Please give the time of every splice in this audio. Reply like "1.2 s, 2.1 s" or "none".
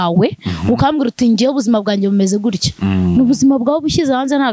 none